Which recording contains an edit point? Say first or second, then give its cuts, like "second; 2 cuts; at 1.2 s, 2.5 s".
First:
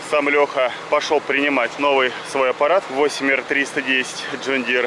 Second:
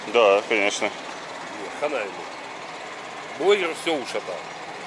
first; 3 cuts; at 0.8 s, 1.7 s, 2.9 s